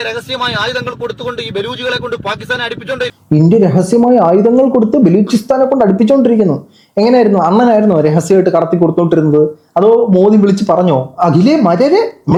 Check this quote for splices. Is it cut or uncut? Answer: uncut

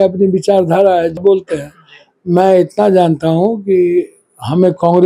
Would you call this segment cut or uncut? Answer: cut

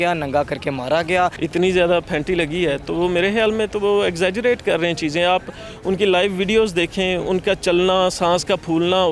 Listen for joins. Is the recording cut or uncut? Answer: cut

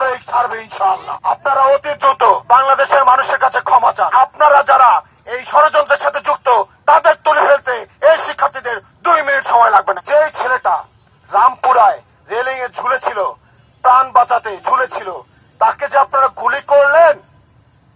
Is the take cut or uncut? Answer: cut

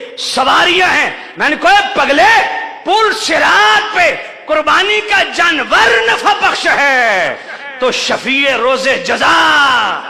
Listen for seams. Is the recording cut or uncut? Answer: uncut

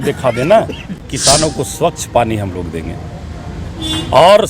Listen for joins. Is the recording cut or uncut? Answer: cut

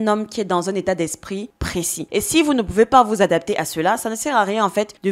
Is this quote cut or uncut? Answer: cut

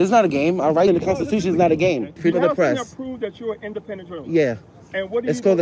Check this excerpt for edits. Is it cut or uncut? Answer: cut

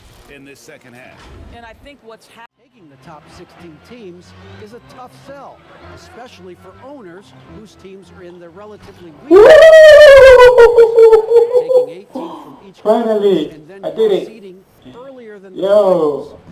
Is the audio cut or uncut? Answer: cut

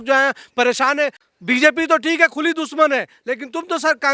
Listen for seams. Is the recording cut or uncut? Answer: cut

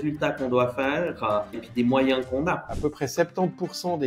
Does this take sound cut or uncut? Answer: cut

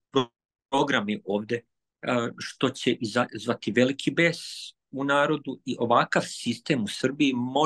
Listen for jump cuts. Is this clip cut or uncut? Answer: uncut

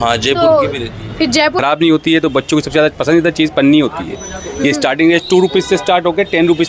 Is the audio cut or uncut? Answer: cut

